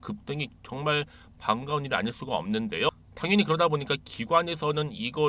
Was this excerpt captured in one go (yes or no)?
no